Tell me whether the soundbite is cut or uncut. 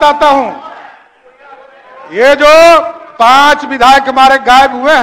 uncut